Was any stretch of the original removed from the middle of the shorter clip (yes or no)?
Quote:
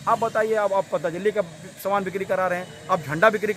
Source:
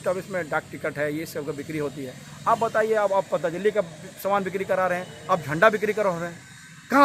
no